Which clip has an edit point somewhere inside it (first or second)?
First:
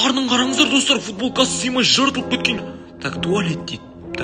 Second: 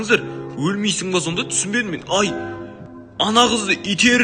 first